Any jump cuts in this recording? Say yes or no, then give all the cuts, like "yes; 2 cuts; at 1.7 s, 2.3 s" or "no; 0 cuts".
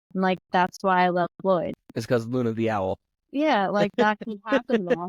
yes; 1 cut; at 3.1 s